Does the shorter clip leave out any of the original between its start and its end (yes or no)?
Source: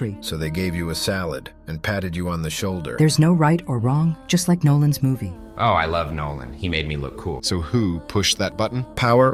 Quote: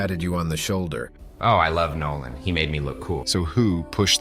yes